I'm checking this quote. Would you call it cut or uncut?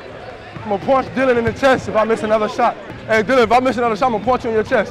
cut